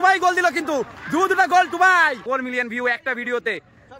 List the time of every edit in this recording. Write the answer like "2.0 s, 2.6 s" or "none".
2.2 s